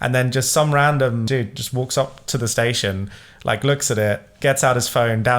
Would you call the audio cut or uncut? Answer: cut